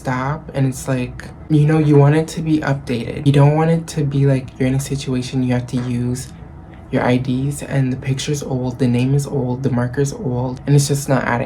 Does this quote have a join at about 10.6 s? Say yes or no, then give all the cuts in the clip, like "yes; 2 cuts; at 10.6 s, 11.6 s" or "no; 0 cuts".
yes; 3 cuts; at 1.3 s, 3.2 s, 10.6 s